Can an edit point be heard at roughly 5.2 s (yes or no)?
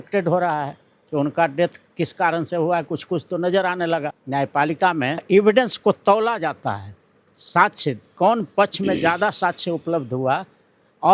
yes